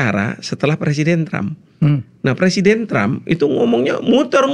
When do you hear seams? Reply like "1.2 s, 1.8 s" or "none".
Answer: none